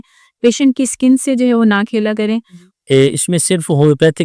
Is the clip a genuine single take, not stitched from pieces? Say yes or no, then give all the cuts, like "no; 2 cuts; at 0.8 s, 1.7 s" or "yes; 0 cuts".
no; 1 cut; at 2.7 s